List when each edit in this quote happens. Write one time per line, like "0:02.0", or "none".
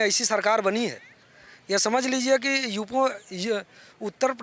none